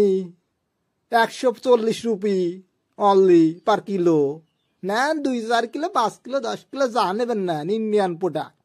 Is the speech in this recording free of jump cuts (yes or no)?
yes